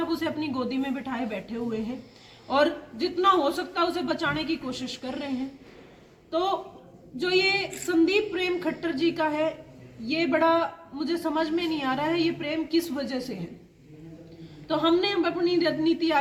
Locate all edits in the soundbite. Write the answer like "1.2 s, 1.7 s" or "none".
none

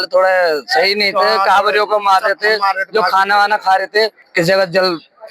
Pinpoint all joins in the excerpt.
4.2 s

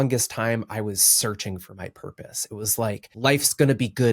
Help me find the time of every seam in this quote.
3.1 s

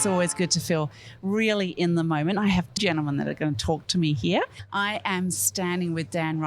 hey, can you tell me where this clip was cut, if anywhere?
2.8 s, 4.6 s

